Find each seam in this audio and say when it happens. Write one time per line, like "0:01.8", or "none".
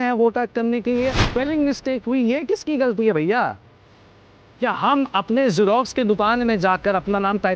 none